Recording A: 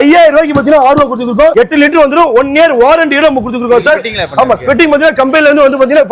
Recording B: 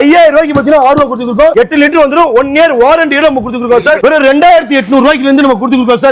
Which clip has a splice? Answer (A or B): B